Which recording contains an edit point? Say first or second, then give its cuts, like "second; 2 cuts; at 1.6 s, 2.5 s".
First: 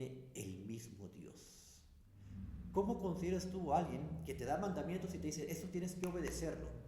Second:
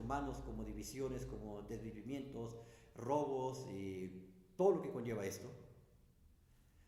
first; 1 cut; at 2.2 s